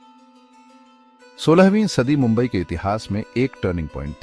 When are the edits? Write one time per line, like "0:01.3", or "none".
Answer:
0:01.4